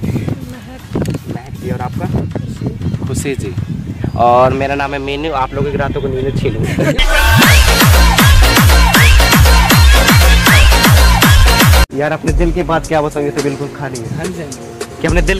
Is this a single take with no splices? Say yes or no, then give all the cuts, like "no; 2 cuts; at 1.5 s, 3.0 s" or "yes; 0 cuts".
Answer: no; 1 cut; at 11.9 s